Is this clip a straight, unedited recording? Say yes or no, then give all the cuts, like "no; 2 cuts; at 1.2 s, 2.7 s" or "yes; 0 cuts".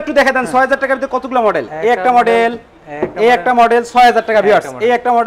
yes; 0 cuts